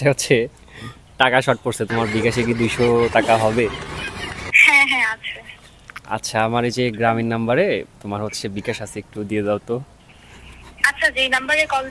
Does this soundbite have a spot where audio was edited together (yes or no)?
no